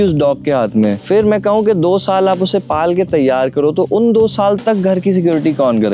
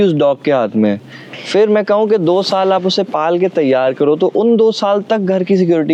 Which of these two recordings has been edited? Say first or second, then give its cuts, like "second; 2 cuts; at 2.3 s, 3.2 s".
first; 1 cut; at 1.0 s